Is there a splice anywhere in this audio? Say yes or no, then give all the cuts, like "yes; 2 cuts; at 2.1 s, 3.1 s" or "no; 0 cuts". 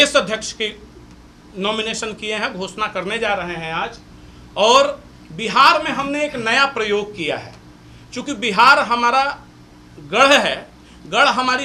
no; 0 cuts